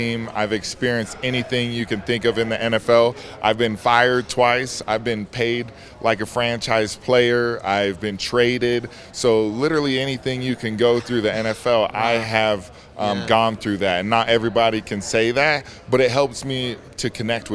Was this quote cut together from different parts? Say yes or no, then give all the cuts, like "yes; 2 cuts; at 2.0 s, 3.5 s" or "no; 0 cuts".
no; 0 cuts